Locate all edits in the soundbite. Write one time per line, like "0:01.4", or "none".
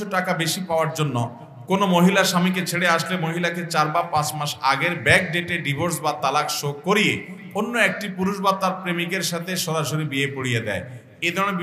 none